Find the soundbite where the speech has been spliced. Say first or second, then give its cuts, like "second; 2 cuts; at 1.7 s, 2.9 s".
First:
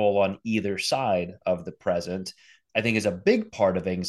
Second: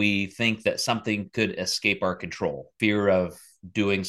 second; 1 cut; at 2.7 s